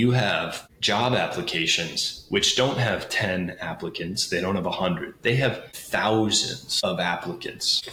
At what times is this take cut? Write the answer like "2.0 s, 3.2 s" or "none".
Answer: none